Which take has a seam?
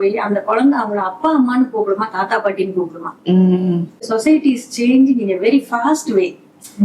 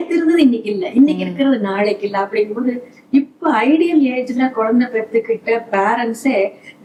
first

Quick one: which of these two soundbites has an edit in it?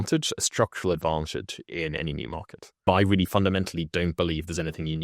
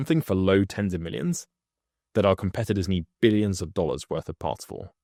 first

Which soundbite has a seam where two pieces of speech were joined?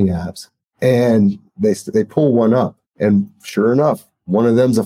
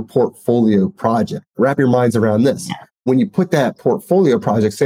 second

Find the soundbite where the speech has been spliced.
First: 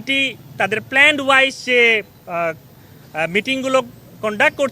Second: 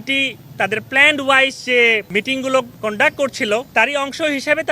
second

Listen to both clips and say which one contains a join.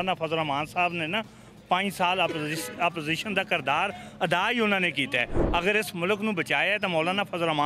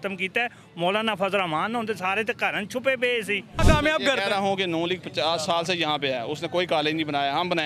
second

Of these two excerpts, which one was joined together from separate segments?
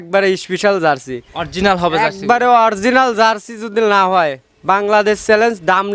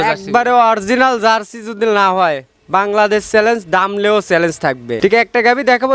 second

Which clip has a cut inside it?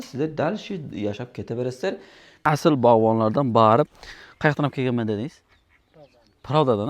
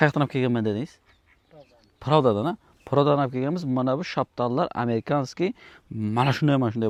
first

